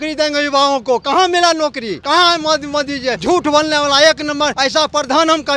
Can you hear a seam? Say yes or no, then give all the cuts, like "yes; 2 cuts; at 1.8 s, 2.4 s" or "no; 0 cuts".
yes; 3 cuts; at 1.9 s, 3.2 s, 4.6 s